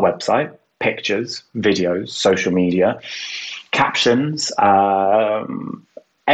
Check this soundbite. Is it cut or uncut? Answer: uncut